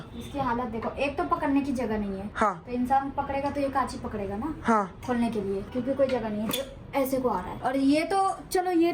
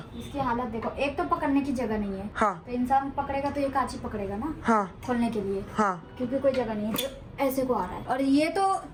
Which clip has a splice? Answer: first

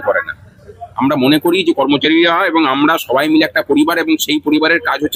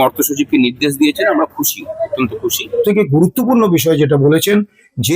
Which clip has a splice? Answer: second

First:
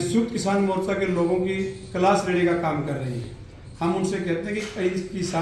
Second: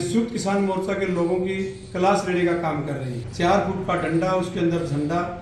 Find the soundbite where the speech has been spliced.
second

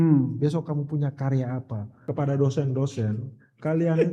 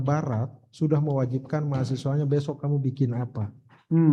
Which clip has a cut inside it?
first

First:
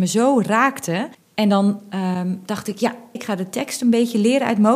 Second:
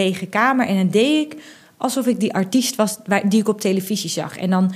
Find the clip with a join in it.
first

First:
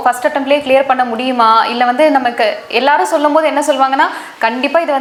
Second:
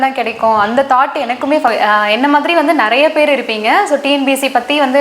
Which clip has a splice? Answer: second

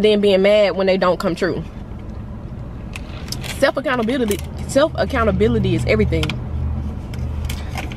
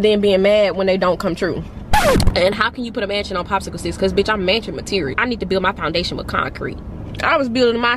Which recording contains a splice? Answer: second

